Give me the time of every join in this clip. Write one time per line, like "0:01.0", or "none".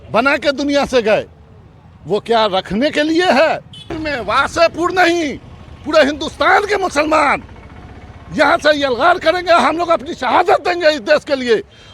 0:03.8